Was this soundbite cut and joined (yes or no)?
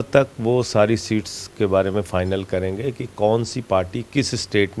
no